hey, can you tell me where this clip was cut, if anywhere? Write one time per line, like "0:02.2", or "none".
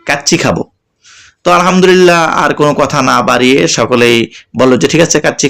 none